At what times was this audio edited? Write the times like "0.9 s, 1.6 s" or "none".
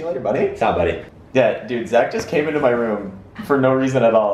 1.1 s

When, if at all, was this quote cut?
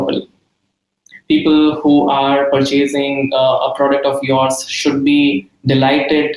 1.1 s

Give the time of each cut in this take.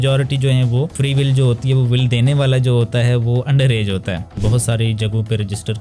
1.0 s, 4.3 s

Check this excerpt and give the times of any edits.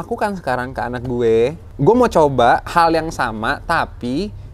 1.7 s

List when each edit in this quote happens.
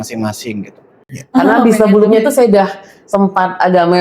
1.4 s

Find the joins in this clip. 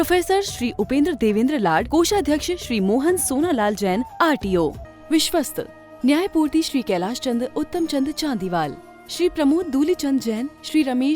4.9 s

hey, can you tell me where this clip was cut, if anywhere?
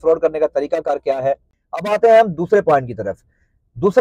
1.5 s

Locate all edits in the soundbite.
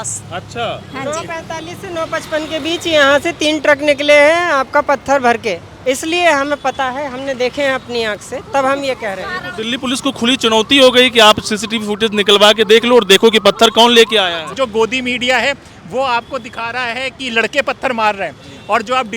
5.7 s, 14.5 s

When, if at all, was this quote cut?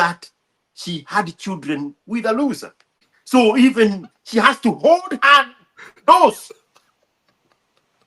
3.1 s

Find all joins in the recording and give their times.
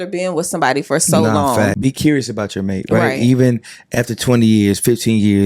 1.7 s

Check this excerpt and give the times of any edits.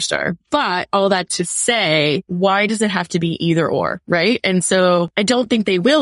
2.3 s, 4.0 s, 5.1 s

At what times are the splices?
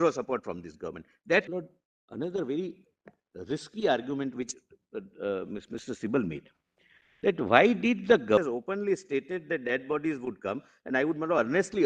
1.5 s, 8.4 s

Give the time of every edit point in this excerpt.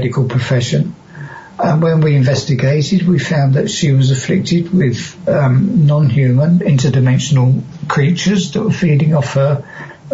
none

